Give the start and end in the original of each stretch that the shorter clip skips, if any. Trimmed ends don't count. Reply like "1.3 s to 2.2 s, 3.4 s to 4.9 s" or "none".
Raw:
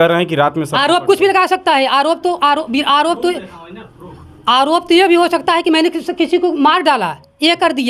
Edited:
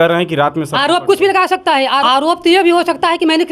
2.0 s to 4.5 s